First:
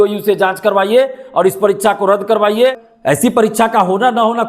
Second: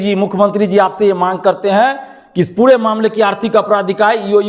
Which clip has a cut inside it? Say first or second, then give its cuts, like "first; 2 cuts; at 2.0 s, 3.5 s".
first; 1 cut; at 2.9 s